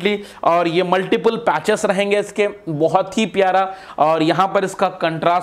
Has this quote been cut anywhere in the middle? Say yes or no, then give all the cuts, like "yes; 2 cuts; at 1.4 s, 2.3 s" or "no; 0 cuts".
no; 0 cuts